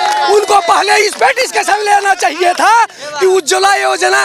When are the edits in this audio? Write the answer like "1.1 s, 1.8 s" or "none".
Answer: none